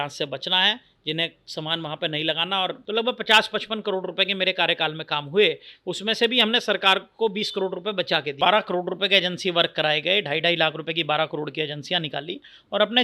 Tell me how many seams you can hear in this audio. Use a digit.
2